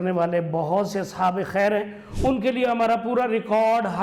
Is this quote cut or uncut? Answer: uncut